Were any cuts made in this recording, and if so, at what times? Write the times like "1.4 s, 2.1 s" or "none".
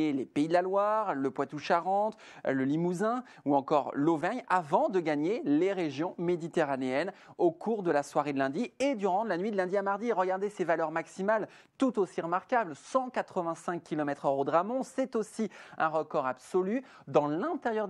12.6 s